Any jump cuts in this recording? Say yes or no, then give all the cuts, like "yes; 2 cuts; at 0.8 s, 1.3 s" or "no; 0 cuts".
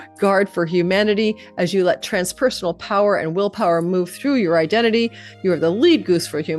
no; 0 cuts